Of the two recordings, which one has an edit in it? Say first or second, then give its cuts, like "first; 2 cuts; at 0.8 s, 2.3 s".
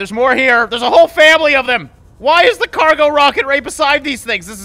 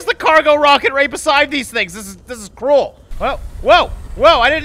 second; 1 cut; at 3.0 s